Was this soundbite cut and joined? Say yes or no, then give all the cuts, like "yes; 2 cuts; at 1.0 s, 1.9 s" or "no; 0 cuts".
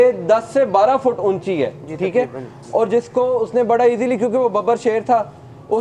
no; 0 cuts